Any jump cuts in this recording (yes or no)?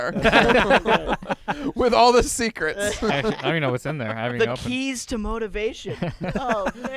no